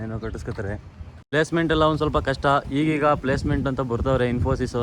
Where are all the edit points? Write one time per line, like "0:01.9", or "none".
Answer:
0:01.3